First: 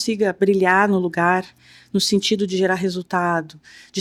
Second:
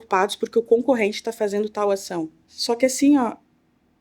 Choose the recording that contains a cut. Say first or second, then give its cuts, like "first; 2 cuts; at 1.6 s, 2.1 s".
second; 1 cut; at 2.4 s